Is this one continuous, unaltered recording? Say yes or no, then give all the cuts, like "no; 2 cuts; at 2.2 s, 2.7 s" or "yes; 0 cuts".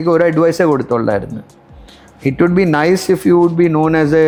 yes; 0 cuts